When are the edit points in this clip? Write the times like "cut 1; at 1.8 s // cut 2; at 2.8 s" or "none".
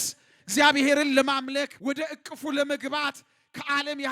cut 1; at 1.7 s